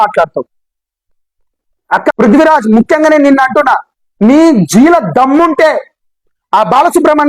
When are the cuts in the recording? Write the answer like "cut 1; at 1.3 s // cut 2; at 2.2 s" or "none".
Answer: cut 1; at 2.1 s